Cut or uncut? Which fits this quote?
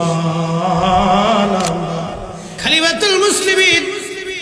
cut